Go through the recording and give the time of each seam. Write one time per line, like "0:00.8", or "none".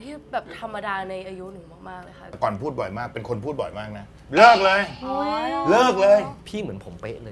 0:02.2
0:04.2
0:06.5